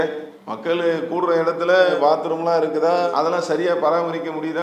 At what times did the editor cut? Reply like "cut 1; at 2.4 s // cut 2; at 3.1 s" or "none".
none

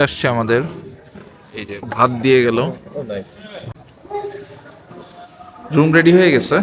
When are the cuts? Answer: cut 1; at 3.7 s

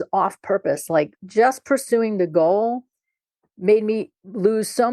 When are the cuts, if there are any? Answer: cut 1; at 1.2 s

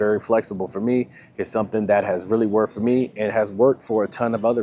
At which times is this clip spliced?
none

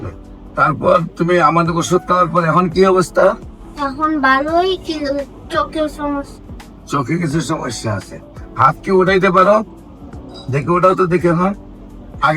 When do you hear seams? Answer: none

